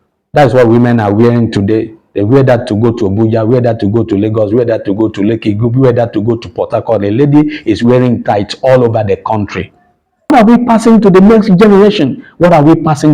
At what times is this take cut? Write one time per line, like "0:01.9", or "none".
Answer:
0:10.3